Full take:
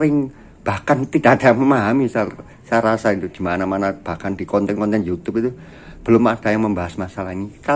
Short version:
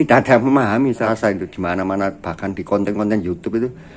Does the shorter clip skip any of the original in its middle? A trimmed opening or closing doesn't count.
yes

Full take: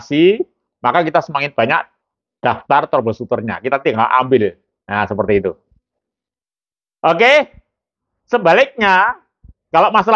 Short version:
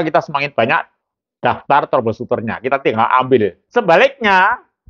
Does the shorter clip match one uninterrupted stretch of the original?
no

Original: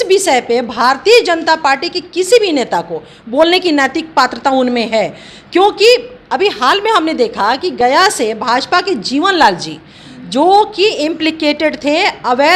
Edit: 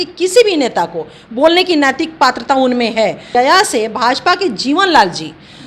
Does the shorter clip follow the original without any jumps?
no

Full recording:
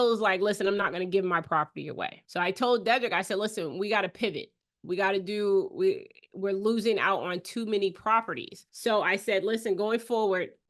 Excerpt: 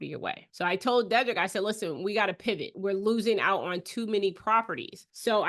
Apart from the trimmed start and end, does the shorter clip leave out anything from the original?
yes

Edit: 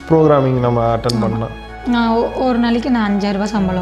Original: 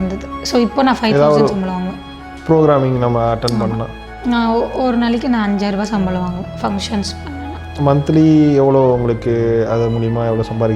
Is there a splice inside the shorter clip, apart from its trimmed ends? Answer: no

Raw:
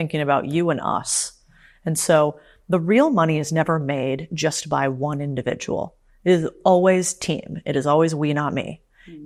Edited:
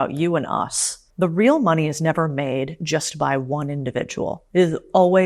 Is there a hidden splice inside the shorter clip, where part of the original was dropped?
yes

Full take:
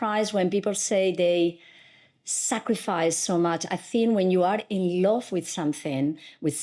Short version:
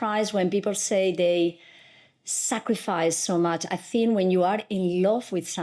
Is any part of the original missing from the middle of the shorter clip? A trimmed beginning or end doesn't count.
no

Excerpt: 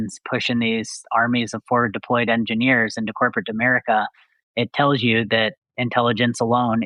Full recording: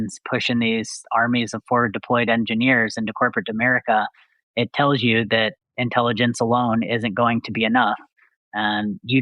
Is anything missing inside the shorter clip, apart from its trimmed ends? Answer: no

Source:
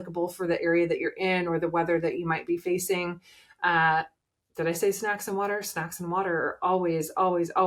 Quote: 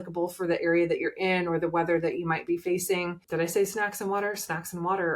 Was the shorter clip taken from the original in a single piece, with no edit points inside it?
no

